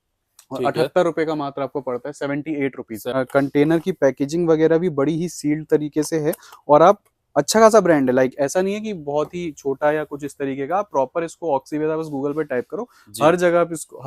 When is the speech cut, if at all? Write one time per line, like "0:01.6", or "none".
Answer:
0:03.1